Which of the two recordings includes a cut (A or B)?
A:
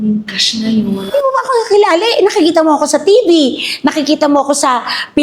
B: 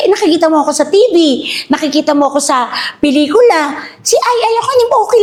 A